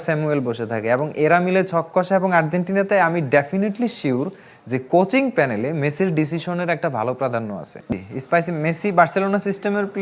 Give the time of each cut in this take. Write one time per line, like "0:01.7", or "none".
0:07.9